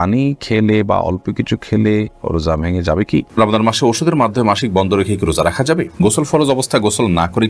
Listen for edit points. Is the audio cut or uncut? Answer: cut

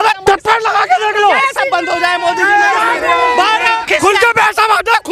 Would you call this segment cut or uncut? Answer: cut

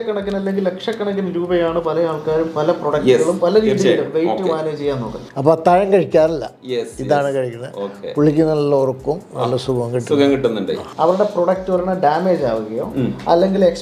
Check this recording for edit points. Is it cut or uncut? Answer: cut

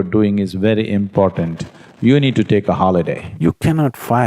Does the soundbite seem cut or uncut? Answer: cut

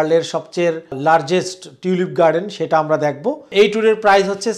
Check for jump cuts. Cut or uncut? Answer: cut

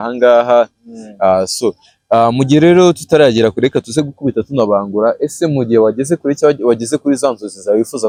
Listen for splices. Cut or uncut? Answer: uncut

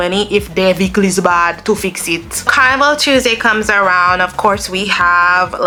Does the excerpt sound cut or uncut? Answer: uncut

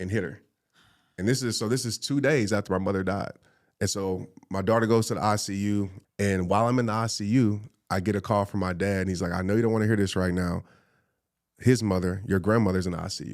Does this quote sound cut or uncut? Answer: cut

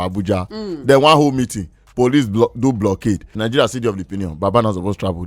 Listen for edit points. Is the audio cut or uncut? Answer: cut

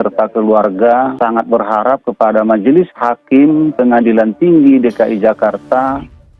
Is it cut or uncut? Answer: cut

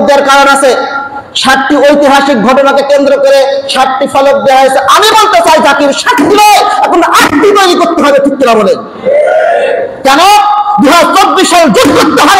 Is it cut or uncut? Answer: uncut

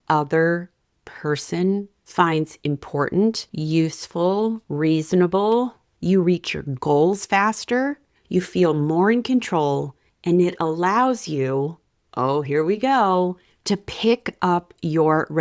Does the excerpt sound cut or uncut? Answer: cut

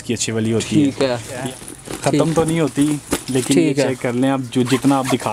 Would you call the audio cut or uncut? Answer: cut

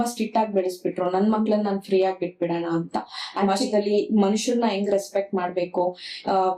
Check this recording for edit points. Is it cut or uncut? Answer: cut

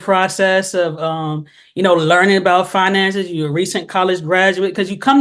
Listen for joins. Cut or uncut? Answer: uncut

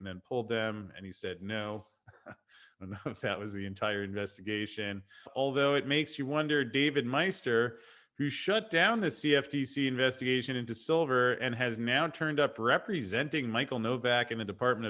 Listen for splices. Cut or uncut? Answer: cut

